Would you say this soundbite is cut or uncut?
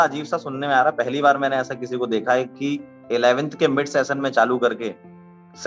uncut